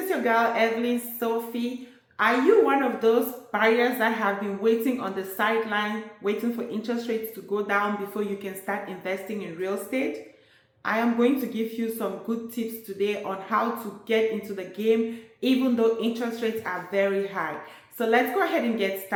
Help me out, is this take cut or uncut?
uncut